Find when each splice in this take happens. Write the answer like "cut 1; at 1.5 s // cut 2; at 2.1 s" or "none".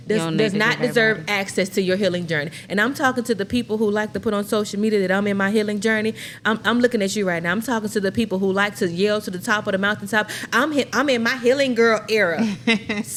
none